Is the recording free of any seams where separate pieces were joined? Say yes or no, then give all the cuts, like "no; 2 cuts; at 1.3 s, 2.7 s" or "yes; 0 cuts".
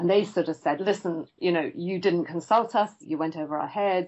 no; 2 cuts; at 0.8 s, 3.0 s